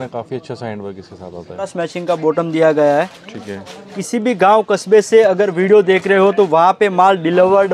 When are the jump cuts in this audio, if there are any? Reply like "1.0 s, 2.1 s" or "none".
1.7 s, 3.9 s